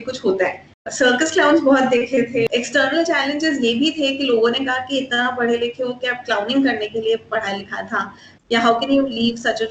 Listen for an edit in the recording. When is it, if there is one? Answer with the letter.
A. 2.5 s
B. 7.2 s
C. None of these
A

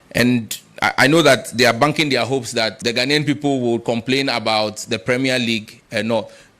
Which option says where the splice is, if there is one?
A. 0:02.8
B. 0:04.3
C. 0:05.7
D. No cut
A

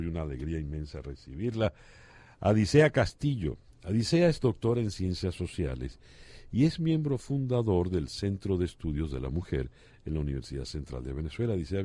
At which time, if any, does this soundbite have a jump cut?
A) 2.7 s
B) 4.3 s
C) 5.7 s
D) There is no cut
A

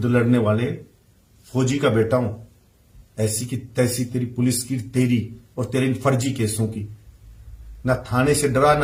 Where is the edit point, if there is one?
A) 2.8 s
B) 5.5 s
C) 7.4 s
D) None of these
D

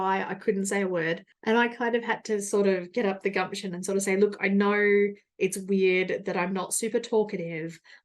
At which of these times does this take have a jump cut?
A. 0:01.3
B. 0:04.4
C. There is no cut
A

